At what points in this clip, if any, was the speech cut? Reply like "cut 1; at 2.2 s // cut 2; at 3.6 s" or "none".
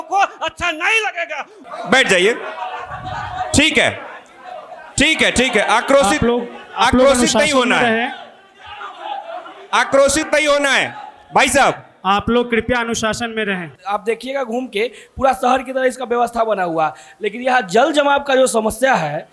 cut 1; at 1.5 s // cut 2; at 13.7 s